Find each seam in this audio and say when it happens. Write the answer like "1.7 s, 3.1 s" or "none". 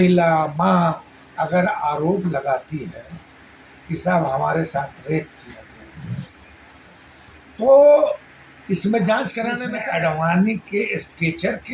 9.6 s